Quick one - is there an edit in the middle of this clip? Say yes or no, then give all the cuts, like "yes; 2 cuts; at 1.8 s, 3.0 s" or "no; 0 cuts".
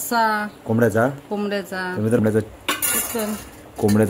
yes; 1 cut; at 2.2 s